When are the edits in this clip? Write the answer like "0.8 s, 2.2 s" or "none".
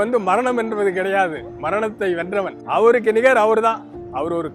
2.6 s